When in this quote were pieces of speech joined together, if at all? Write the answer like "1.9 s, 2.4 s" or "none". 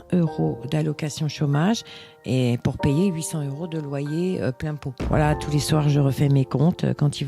4.9 s